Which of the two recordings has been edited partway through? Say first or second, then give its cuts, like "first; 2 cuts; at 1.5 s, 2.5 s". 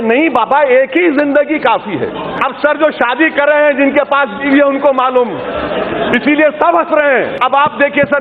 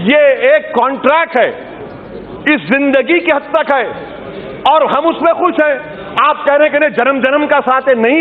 first; 2 cuts; at 2.4 s, 7.3 s